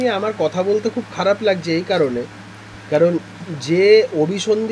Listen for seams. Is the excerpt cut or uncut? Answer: uncut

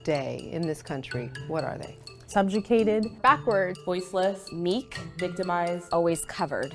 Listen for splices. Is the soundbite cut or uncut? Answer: uncut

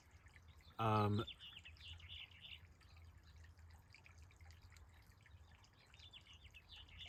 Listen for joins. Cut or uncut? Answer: uncut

